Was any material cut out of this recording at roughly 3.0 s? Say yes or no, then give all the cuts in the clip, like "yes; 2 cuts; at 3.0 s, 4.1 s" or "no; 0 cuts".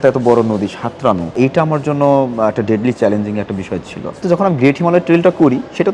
no; 2 cuts; at 1.3 s, 4.2 s